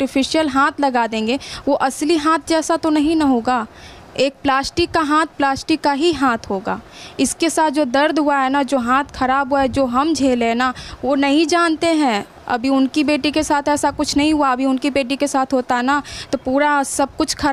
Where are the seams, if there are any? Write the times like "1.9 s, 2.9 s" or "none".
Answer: none